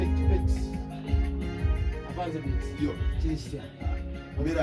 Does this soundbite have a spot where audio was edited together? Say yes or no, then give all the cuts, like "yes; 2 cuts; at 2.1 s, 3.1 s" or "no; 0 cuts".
no; 0 cuts